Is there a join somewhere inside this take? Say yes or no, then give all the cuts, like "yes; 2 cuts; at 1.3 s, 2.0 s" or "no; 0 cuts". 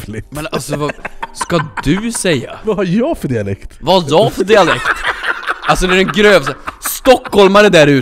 yes; 2 cuts; at 2.5 s, 3.7 s